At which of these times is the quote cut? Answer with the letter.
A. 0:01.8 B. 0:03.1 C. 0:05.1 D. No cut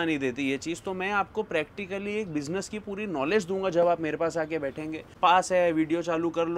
C